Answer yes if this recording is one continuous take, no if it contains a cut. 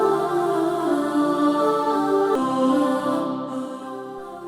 no